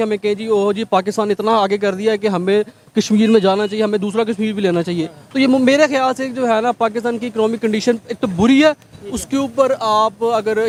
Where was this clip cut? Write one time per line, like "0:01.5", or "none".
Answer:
none